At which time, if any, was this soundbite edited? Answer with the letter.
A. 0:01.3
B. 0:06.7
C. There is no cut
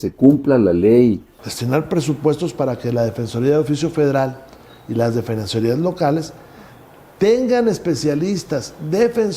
A